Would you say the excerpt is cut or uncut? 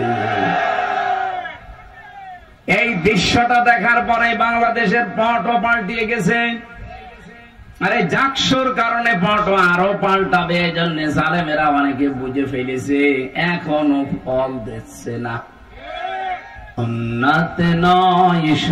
cut